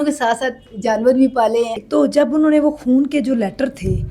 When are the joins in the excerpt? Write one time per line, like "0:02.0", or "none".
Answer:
0:01.8